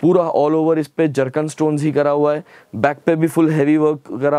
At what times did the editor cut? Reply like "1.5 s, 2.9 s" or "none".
none